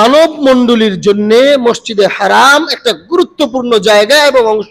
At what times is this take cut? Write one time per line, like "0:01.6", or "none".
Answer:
none